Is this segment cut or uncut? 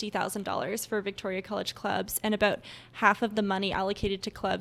uncut